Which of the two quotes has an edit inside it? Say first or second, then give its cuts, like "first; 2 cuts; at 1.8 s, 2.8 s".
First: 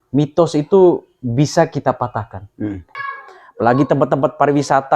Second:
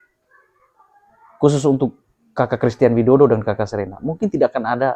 first; 1 cut; at 2.9 s